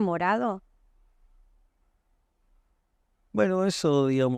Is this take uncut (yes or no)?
yes